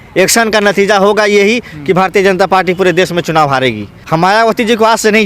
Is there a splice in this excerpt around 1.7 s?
no; 1 cut; at 3.9 s

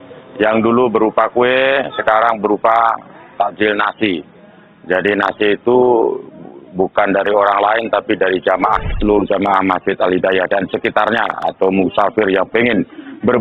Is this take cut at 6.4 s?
no; 1 cut; at 8.9 s

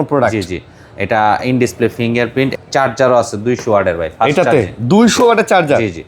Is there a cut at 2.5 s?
yes; 1 cut; at 2.5 s

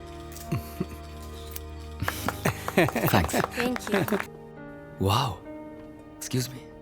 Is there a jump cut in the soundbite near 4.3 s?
yes; 1 cut; at 4.3 s

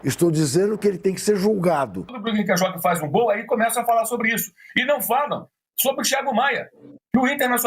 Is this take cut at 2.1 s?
yes; 1 cut; at 2.1 s

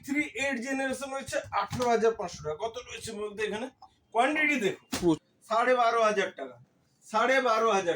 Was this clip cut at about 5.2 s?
yes; 1 cut; at 5.2 s

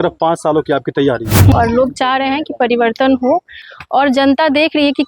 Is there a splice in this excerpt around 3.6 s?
yes; 2 cuts; at 1.5 s, 3.6 s

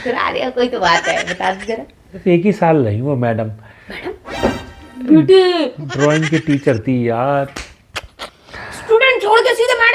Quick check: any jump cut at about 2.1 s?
yes; 2 cuts; at 2.1 s, 7.6 s

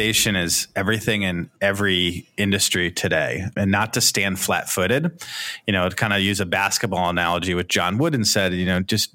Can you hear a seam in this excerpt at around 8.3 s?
no; 0 cuts

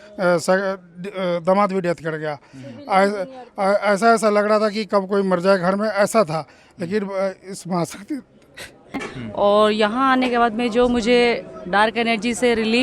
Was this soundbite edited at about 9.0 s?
yes; 1 cut; at 9.0 s

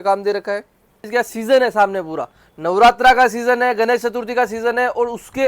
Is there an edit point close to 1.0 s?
yes; 1 cut; at 1.0 s

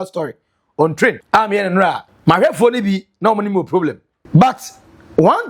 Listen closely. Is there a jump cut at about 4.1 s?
yes; 3 cuts; at 1.2 s, 2.1 s, 4.1 s

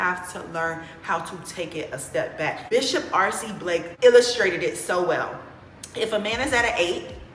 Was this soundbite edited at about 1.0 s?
no; 2 cuts; at 2.6 s, 3.9 s

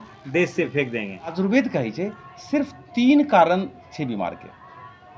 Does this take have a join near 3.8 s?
no; 1 cut; at 1.3 s

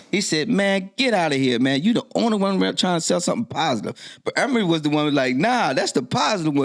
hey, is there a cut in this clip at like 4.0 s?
yes; 1 cut; at 4.0 s

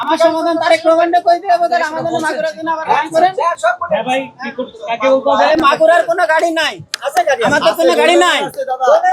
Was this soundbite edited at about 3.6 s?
no; 0 cuts

